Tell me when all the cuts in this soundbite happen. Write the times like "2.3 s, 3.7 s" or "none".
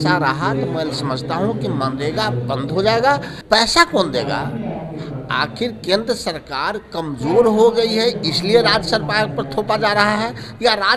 3.3 s